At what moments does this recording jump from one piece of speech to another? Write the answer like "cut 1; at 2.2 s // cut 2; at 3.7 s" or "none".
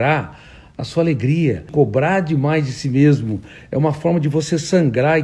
cut 1; at 1.7 s